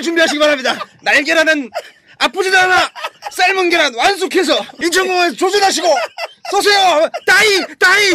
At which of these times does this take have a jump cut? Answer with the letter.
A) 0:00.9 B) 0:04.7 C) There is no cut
B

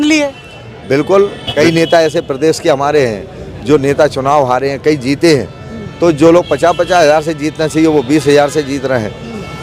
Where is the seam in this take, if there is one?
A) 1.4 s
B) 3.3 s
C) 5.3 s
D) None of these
D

